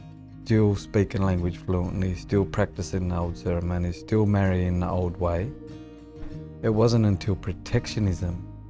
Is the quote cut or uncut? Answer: uncut